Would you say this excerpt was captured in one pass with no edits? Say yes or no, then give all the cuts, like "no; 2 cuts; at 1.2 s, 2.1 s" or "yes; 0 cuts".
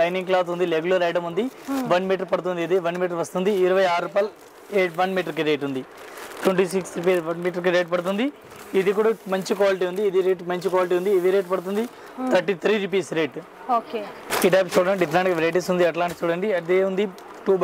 yes; 0 cuts